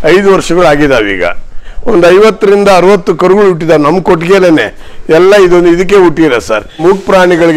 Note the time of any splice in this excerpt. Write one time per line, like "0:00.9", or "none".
0:01.5
0:06.8